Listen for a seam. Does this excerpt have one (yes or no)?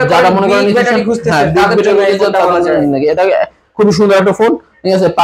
no